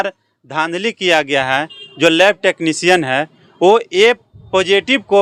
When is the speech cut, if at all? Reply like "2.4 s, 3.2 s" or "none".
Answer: none